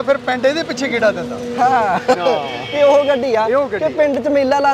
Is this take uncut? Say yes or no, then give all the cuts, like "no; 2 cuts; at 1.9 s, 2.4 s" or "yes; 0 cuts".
yes; 0 cuts